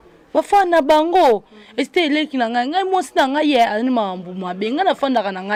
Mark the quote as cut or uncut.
uncut